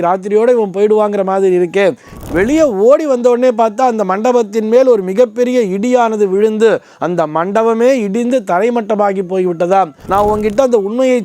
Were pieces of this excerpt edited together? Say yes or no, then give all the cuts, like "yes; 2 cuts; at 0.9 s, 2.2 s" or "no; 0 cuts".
yes; 2 cuts; at 2.2 s, 10.0 s